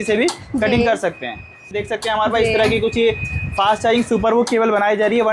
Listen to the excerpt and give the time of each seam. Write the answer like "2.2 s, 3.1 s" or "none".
1.7 s